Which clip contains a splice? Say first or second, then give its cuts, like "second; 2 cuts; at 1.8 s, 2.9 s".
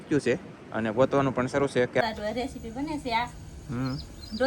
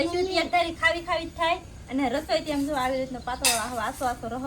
first; 1 cut; at 2.0 s